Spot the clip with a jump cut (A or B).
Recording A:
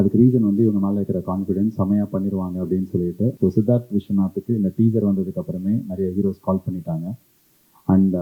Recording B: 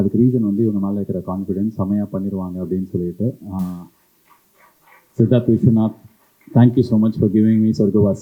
A